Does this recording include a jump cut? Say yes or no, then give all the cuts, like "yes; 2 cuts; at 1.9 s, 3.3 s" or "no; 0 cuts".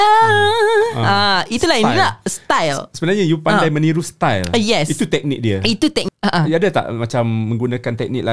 no; 0 cuts